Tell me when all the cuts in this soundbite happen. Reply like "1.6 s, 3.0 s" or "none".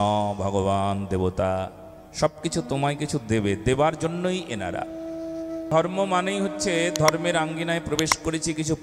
5.7 s